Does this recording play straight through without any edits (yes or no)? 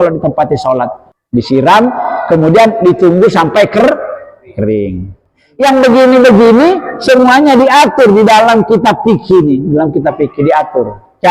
no